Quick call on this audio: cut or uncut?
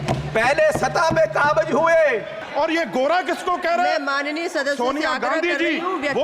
cut